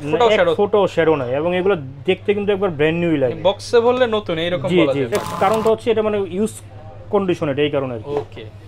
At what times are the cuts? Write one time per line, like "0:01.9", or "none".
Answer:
0:05.1